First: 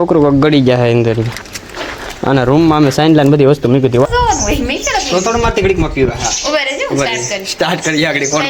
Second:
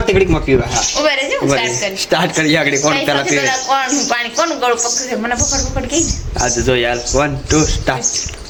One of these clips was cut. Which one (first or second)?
first